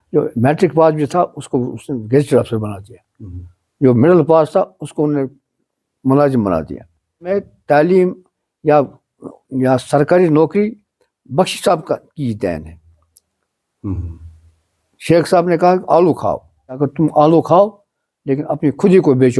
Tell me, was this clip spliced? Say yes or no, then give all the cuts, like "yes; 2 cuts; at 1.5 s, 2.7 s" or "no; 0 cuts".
yes; 2 cuts; at 7.3 s, 16.8 s